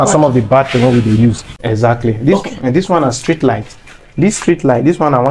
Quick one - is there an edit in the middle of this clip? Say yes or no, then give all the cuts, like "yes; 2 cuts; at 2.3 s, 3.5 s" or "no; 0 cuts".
yes; 1 cut; at 1.5 s